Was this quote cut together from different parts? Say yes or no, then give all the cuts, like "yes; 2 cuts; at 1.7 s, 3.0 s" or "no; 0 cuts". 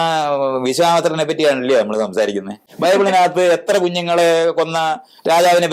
yes; 1 cut; at 2.6 s